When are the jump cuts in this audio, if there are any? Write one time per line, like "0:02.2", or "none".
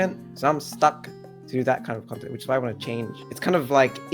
0:03.2